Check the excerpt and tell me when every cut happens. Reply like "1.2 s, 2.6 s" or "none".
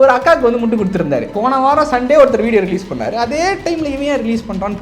1.3 s